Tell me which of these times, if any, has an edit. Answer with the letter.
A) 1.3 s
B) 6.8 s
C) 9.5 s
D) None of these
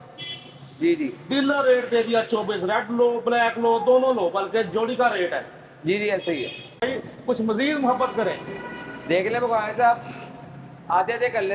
B